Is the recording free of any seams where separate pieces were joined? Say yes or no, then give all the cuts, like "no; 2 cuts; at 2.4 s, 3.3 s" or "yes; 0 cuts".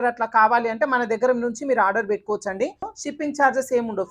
no; 1 cut; at 2.9 s